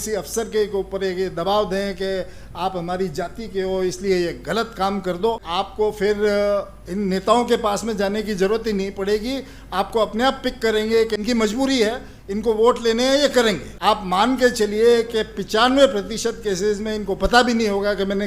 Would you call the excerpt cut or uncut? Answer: cut